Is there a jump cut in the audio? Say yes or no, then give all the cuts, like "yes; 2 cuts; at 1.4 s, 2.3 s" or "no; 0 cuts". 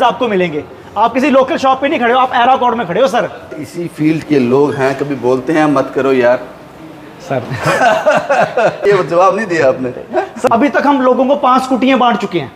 yes; 3 cuts; at 3.6 s, 8.8 s, 10.4 s